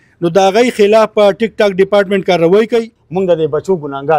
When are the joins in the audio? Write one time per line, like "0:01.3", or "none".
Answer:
0:03.0